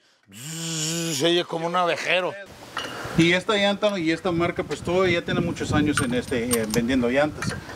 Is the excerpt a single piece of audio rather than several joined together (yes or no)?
no